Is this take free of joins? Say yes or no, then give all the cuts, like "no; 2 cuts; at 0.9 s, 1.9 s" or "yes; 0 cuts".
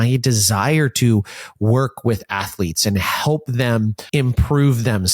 no; 1 cut; at 4.0 s